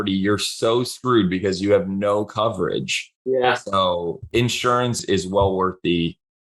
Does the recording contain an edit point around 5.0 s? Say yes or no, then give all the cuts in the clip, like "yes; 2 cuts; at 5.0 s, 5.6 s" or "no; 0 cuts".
yes; 1 cut; at 5.0 s